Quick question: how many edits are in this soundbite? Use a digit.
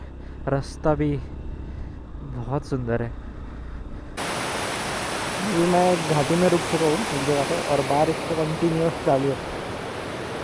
1